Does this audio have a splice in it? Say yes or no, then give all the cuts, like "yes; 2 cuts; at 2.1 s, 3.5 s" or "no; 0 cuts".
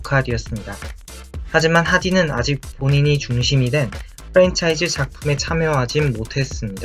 yes; 1 cut; at 2.2 s